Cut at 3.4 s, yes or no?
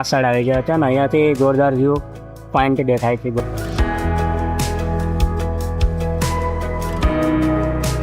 yes